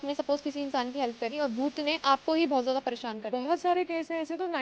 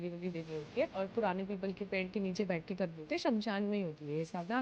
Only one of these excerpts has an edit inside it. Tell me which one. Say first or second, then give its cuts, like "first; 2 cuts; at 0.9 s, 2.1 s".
second; 1 cut; at 0.9 s